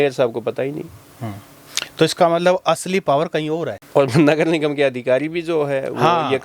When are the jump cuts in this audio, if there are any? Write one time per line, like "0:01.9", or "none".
none